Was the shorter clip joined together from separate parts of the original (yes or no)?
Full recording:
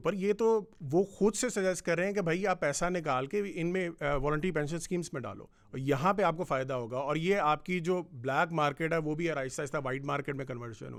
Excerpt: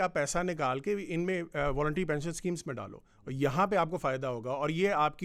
no